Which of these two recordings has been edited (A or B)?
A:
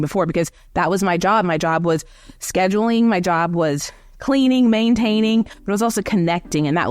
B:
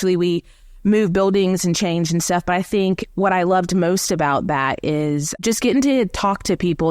B